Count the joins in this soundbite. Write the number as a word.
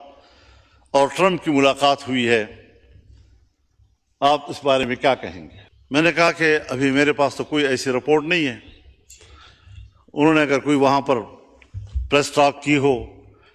zero